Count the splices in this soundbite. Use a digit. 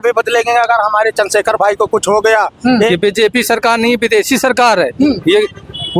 1